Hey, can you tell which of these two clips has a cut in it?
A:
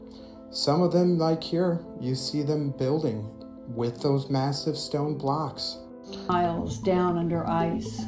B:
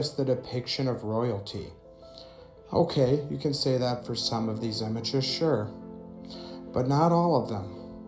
A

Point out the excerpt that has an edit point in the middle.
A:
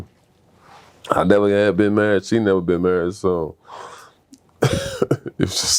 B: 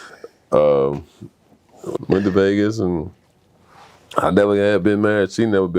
B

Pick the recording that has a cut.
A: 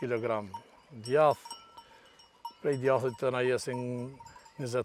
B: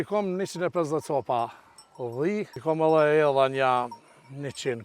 B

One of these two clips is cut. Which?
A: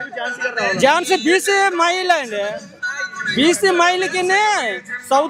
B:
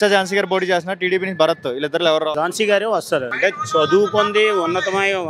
B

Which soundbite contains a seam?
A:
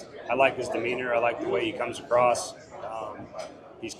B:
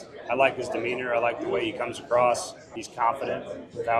B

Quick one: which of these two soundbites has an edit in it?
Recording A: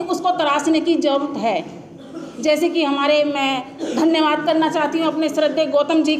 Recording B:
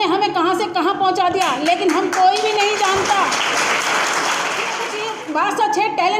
B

